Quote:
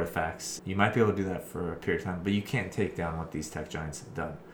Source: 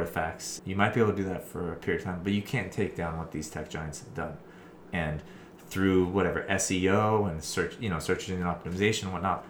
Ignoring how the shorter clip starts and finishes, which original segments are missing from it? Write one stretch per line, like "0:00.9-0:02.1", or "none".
none